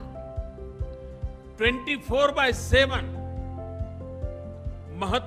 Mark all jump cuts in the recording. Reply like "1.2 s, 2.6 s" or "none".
none